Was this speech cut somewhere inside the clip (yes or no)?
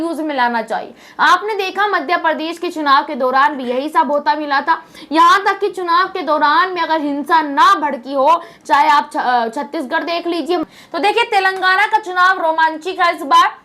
yes